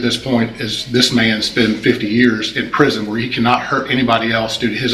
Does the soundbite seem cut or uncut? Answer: uncut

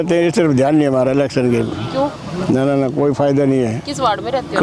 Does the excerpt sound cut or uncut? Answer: uncut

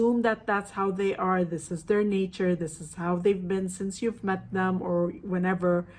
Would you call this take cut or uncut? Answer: uncut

